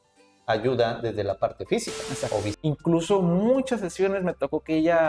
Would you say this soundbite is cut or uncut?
cut